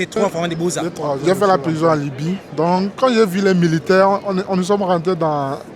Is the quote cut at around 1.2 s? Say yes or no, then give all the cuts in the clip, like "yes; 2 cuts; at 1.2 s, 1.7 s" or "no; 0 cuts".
yes; 1 cut; at 1.2 s